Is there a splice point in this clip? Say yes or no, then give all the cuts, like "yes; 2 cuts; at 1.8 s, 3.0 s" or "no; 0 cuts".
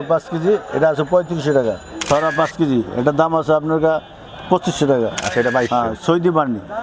yes; 2 cuts; at 2.1 s, 5.2 s